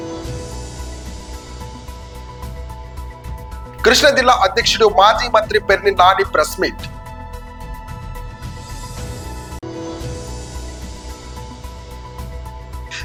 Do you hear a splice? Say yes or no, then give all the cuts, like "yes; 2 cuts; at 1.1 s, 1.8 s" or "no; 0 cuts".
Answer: no; 0 cuts